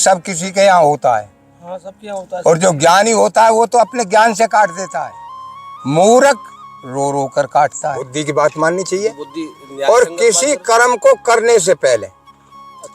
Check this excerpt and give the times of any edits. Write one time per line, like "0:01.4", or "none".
0:08.2